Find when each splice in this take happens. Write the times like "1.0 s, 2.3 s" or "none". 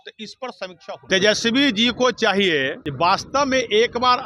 1.0 s, 2.8 s